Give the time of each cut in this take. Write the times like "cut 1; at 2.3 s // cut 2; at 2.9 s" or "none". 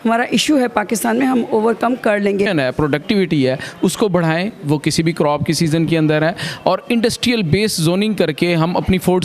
cut 1; at 2.5 s